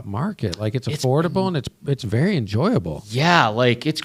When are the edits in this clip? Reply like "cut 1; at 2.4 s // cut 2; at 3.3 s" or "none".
none